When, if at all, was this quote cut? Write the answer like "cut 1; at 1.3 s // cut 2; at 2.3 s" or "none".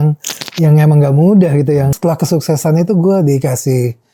cut 1; at 2.0 s